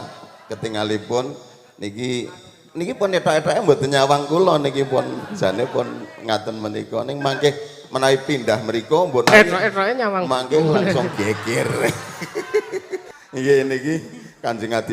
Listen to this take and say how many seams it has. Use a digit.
1